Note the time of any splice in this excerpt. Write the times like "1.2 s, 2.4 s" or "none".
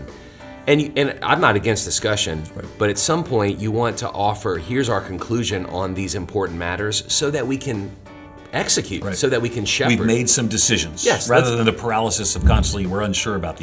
none